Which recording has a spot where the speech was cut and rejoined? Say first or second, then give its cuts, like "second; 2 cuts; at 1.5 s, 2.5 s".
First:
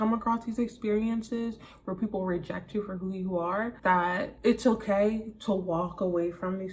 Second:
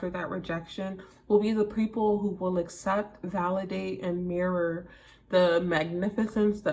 first; 1 cut; at 4.1 s